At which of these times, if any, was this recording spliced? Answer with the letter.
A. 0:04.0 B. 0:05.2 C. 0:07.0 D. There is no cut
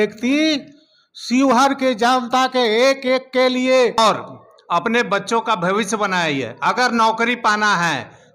A